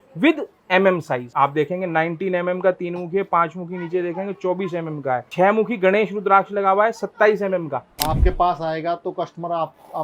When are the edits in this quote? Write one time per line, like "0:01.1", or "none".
0:01.3
0:05.3
0:07.9